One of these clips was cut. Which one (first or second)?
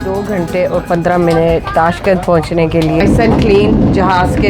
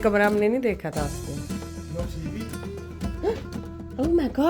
first